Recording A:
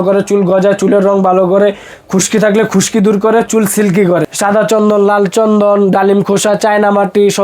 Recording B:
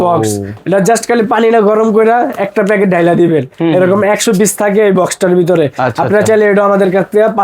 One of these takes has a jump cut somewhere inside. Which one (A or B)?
A